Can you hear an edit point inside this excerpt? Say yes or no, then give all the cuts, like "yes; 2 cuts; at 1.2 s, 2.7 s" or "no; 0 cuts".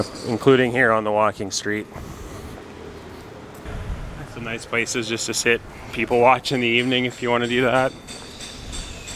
yes; 1 cut; at 3.7 s